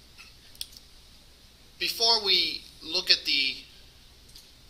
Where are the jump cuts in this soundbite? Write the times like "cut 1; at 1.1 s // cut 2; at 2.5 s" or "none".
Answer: cut 1; at 2.7 s